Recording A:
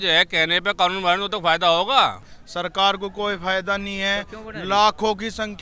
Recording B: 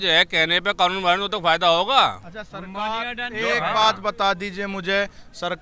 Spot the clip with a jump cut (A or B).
A